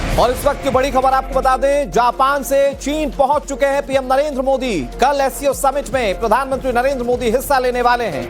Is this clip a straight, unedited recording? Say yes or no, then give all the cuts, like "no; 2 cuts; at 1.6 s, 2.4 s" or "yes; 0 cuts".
yes; 0 cuts